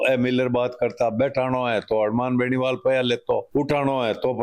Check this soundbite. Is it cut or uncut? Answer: uncut